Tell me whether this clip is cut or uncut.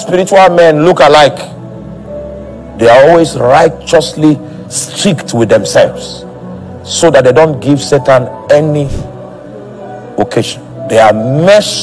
uncut